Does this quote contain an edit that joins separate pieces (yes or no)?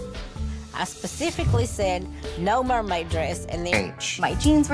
yes